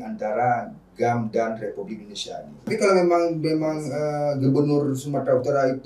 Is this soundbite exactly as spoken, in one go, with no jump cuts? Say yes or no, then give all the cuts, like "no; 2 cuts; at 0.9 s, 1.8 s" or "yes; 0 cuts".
no; 1 cut; at 2.7 s